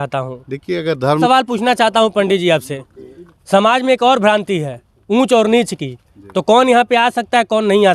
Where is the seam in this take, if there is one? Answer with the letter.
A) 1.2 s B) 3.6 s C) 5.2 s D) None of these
A